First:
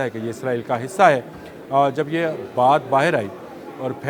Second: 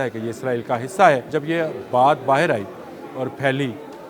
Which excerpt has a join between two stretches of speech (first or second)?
second